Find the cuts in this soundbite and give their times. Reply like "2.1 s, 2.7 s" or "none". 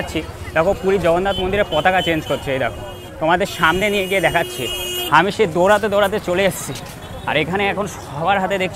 none